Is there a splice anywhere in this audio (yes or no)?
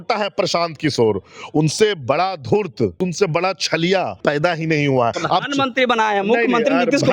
yes